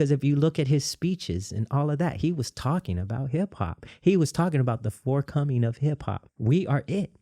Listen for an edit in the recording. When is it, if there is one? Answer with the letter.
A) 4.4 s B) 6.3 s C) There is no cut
B